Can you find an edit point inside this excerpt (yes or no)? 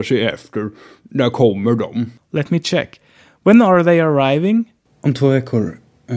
no